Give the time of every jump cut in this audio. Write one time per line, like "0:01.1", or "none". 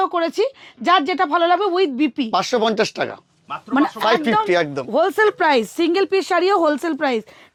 none